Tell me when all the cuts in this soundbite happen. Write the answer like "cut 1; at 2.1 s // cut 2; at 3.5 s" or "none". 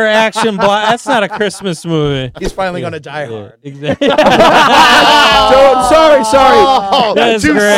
cut 1; at 2.3 s